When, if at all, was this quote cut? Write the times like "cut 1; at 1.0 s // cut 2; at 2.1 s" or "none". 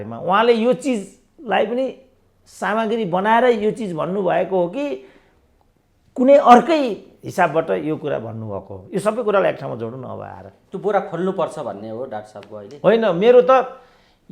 none